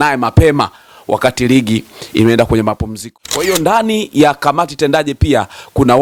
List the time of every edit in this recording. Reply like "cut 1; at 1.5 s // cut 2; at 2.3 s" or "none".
cut 1; at 3.0 s